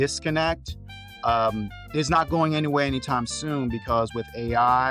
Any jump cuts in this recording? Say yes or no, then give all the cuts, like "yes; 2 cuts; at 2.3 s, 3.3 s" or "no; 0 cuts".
no; 0 cuts